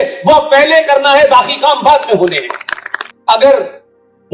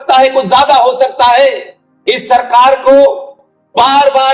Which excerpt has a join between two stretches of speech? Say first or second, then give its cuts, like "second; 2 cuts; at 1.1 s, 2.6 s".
first; 1 cut; at 3.0 s